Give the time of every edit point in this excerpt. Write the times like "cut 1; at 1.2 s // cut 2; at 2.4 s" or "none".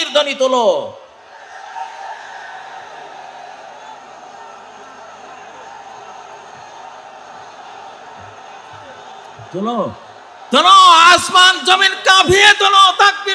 none